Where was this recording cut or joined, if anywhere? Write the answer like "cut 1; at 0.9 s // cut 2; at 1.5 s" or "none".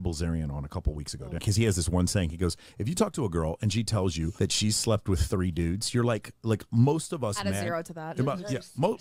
cut 1; at 1.4 s // cut 2; at 4.3 s